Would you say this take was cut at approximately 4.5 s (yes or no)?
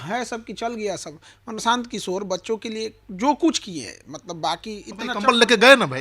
no